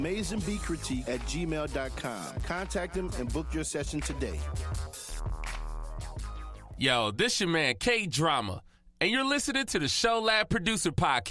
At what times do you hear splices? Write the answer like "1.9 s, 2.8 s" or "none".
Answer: 6.6 s